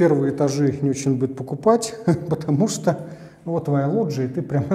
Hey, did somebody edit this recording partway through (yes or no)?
no